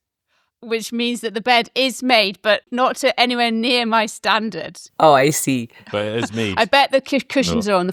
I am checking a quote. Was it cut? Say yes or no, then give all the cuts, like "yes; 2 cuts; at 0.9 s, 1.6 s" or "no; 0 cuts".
no; 0 cuts